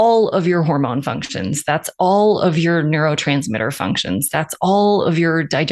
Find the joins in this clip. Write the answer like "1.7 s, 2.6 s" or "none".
none